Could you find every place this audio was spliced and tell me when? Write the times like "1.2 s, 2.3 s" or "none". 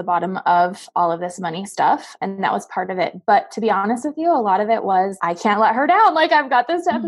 2.1 s, 5.1 s